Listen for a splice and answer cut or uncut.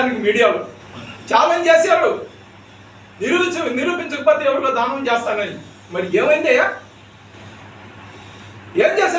uncut